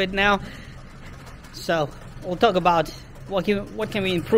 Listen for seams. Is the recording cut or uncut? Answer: uncut